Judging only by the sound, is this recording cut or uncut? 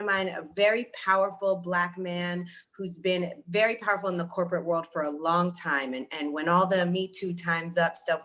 uncut